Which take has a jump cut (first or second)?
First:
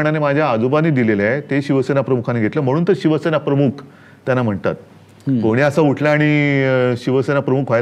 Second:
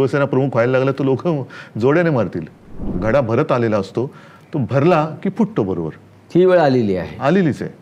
second